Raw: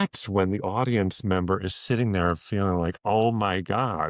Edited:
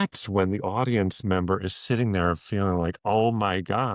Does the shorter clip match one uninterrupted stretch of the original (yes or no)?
yes